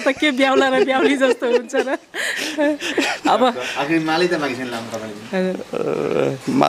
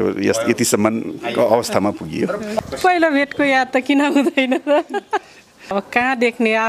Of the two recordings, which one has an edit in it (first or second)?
second